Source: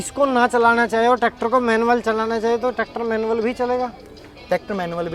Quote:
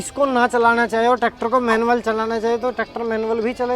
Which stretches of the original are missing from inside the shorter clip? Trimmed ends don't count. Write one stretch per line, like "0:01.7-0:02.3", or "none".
none